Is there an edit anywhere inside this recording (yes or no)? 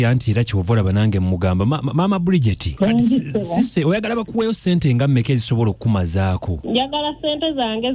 no